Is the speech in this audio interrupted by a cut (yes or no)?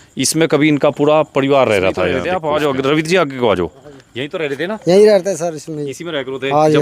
yes